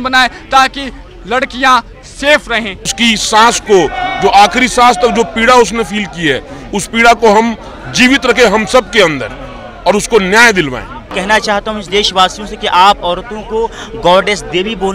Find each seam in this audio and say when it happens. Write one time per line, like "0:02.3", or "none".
0:02.9
0:11.1